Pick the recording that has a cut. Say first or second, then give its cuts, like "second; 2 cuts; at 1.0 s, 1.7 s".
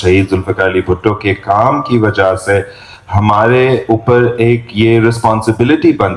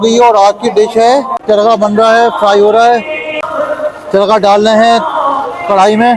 second; 2 cuts; at 1.4 s, 3.5 s